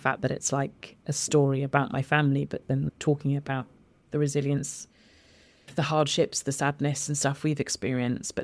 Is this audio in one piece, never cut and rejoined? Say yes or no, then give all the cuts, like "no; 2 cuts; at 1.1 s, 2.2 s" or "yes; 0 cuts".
no; 2 cuts; at 2.9 s, 5.7 s